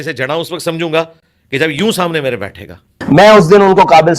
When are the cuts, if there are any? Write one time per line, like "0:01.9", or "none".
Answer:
0:03.0